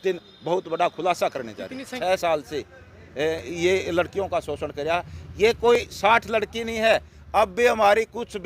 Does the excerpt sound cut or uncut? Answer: cut